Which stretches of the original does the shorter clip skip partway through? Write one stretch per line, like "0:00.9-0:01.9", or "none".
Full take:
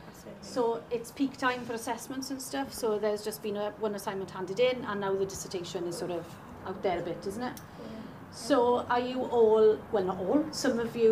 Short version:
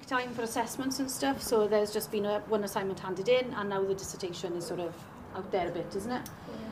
none

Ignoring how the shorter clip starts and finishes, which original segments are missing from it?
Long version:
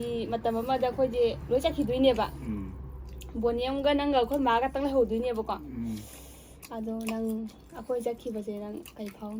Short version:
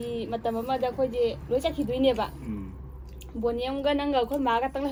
none

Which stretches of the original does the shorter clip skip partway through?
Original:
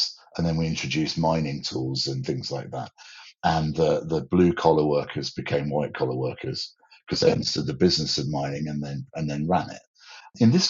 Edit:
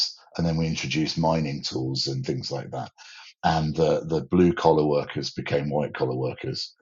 none

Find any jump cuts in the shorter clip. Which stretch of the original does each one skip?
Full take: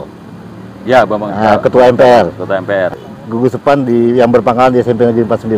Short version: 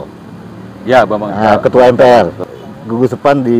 0:02.5-0:02.9

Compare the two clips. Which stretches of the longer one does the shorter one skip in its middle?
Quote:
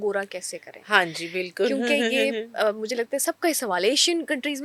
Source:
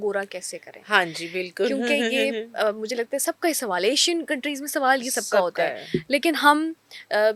none

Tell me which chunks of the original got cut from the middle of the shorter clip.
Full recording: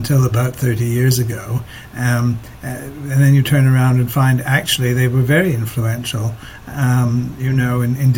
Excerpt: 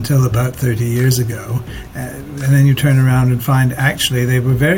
0:01.8-0:02.5

